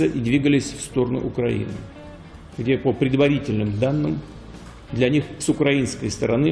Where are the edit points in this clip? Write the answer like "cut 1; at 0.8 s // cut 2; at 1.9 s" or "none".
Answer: none